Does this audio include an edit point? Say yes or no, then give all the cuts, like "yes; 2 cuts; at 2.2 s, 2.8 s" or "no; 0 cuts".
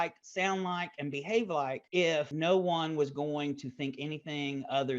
yes; 1 cut; at 2.1 s